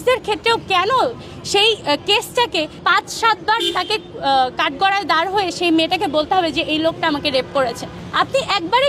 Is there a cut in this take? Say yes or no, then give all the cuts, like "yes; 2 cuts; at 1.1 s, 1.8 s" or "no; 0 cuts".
no; 0 cuts